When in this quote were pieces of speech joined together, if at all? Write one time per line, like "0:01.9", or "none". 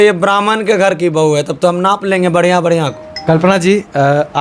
0:03.2